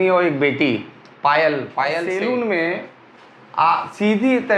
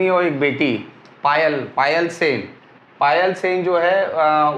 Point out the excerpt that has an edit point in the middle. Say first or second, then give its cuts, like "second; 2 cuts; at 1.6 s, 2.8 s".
first; 1 cut; at 2.0 s